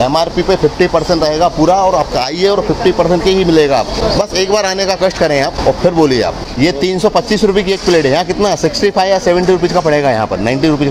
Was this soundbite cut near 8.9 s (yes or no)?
no